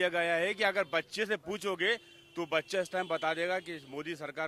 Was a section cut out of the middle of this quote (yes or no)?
no